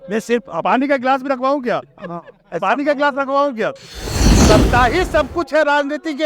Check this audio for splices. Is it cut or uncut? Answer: cut